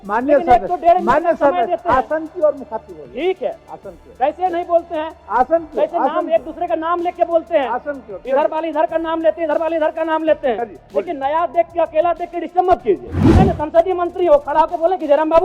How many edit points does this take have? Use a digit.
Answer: 1